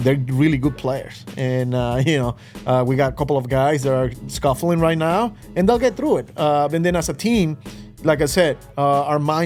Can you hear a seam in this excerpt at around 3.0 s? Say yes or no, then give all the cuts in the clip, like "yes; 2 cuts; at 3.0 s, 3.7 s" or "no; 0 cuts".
no; 0 cuts